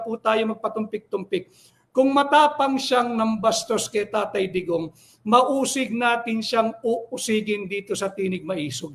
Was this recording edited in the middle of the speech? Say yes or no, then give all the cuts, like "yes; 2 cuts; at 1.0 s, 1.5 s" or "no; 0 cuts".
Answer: no; 0 cuts